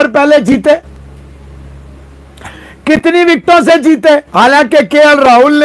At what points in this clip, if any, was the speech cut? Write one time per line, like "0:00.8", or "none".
none

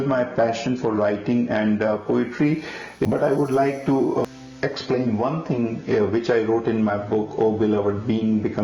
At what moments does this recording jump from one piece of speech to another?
0:03.1
0:04.2

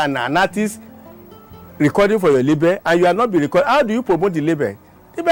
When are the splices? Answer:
none

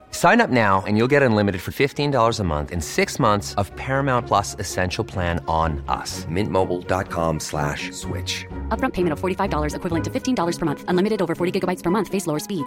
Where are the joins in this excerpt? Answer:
none

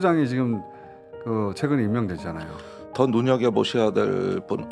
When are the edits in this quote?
0:02.8

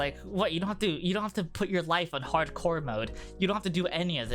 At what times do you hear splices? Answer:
none

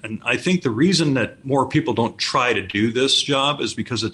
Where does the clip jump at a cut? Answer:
0:01.4

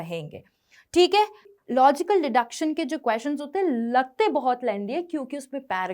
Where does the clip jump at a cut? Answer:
0:01.4

